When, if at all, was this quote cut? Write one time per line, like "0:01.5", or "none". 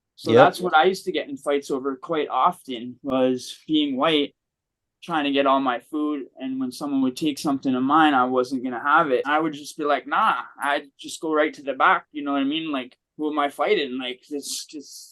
0:09.3